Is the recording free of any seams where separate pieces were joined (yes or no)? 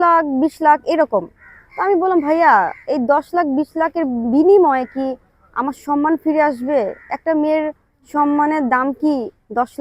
yes